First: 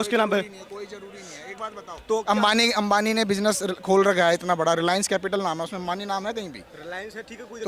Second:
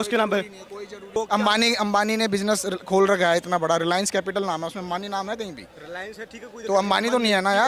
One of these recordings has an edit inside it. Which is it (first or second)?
second